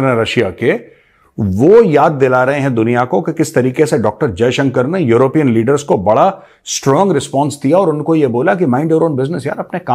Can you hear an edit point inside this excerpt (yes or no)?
no